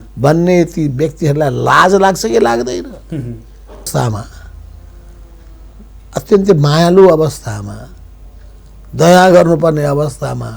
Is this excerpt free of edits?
no; 1 cut; at 3.9 s

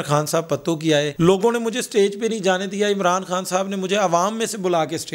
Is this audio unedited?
yes; 0 cuts

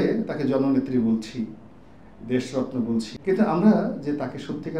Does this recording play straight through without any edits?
no; 1 cut; at 3.1 s

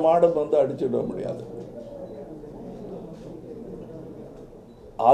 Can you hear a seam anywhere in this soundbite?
no; 0 cuts

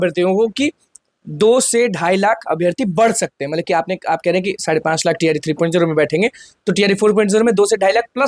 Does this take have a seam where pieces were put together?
no; 0 cuts

